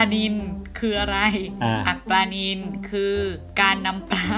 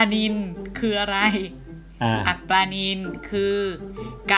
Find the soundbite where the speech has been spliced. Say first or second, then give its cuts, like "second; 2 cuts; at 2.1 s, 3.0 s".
first; 2 cuts; at 1.5 s, 3.4 s